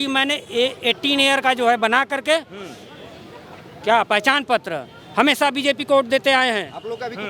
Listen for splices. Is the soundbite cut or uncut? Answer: uncut